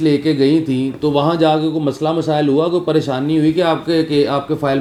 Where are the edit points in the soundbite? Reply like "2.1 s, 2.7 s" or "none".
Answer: none